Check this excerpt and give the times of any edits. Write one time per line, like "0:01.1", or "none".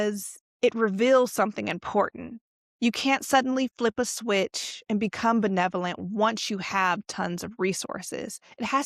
none